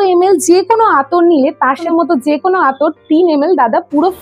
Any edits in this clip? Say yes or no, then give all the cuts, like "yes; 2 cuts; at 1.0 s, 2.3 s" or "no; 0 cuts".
yes; 1 cut; at 1.9 s